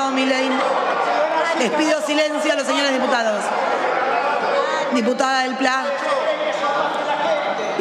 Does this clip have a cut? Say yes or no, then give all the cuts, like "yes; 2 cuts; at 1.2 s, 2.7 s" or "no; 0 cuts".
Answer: no; 0 cuts